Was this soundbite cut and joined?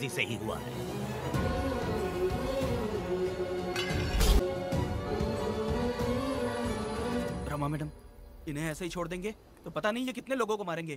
yes; 1 cut; at 4.4 s

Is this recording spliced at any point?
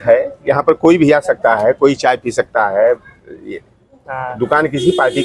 no; 0 cuts

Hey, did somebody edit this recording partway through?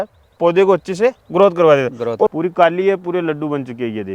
yes; 1 cut; at 2.3 s

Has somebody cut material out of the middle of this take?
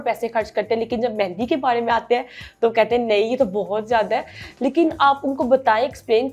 no; 0 cuts

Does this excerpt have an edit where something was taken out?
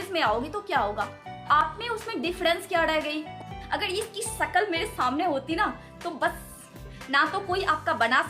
yes; 3 cuts; at 1.6 s, 3.5 s, 6.7 s

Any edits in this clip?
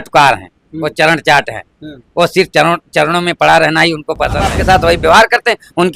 yes; 1 cut; at 4.6 s

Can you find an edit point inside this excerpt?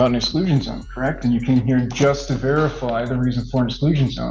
no; 0 cuts

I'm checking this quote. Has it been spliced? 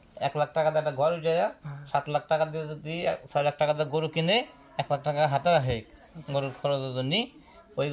no; 0 cuts

